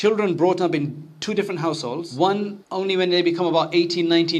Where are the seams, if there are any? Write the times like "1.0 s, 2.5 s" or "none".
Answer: 2.1 s, 2.6 s